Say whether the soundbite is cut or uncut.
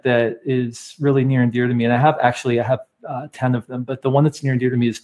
uncut